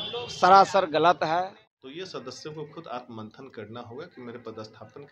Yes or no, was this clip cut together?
yes